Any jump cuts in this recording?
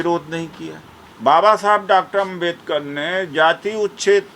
yes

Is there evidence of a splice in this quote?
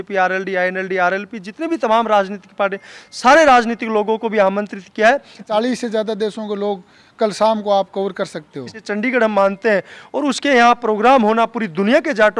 yes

